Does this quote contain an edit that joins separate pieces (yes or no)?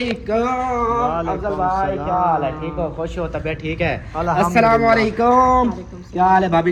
no